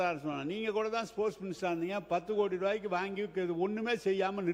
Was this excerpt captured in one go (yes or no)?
yes